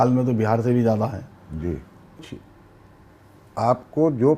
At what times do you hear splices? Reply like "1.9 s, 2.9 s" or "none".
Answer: 2.2 s